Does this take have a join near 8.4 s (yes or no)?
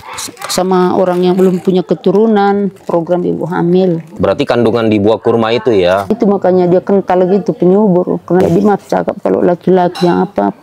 yes